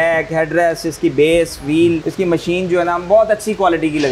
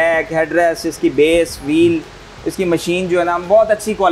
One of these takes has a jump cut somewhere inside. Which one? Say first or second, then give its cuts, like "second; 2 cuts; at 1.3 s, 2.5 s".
first; 1 cut; at 2.1 s